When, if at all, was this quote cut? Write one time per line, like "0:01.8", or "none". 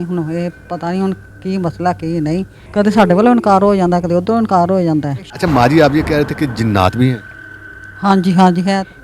0:02.6
0:05.2